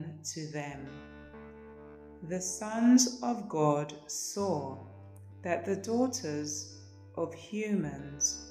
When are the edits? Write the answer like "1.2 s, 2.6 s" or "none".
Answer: none